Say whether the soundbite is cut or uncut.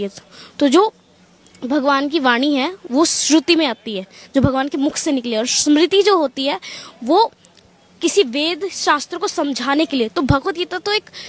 uncut